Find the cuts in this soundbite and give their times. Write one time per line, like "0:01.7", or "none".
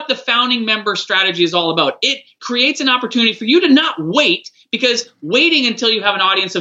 0:02.4